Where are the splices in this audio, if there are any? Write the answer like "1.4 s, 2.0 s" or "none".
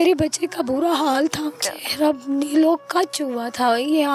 1.5 s